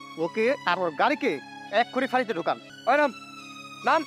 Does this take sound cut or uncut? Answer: uncut